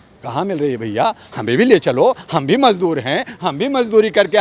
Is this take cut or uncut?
uncut